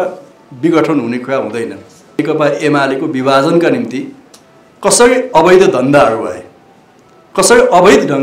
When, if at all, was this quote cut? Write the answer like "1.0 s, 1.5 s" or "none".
2.2 s

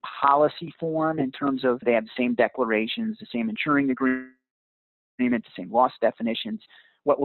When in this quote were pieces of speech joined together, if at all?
1.8 s

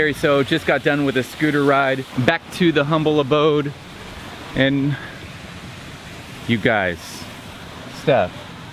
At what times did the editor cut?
2.1 s

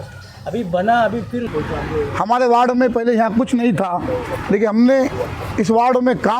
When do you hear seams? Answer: 1.5 s

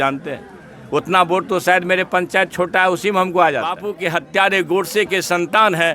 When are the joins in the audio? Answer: 3.9 s

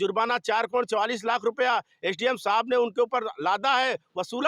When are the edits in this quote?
none

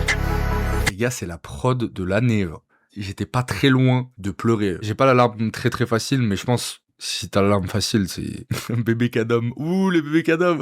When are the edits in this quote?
0.8 s, 4.8 s

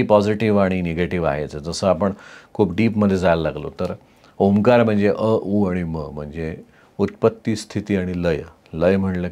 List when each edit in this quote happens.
none

